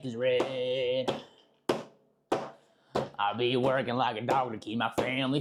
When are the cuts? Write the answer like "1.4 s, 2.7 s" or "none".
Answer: none